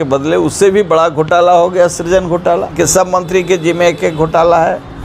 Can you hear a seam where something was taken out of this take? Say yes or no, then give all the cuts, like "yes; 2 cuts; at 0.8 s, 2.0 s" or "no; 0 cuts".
yes; 1 cut; at 2.7 s